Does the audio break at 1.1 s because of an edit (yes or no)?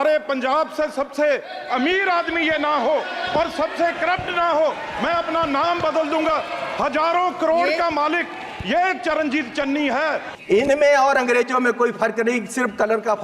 no